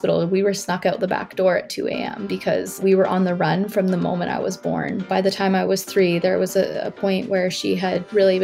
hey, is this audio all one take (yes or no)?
no